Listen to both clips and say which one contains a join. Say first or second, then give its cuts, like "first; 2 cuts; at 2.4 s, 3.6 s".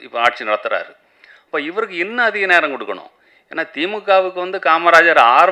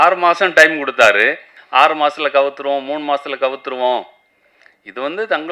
second; 1 cut; at 1.5 s